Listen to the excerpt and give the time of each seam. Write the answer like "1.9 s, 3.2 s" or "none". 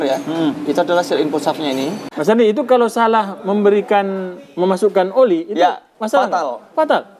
2.1 s